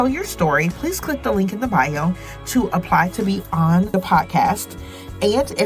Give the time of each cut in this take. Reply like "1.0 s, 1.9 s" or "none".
3.9 s